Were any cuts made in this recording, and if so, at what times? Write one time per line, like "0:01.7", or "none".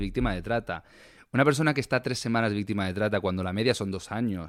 none